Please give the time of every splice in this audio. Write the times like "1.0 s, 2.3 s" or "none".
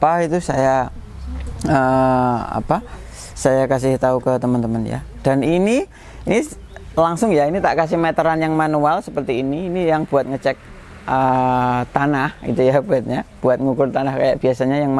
none